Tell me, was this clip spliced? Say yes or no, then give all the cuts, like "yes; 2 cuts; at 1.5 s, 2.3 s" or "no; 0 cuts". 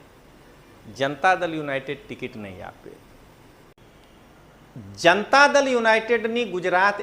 yes; 1 cut; at 3.7 s